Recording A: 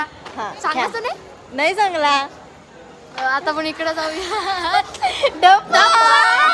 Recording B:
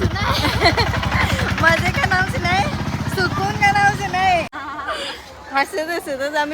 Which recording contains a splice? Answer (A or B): B